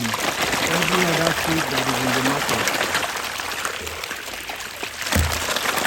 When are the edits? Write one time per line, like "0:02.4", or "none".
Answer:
none